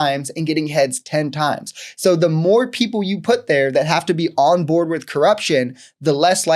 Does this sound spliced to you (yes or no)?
no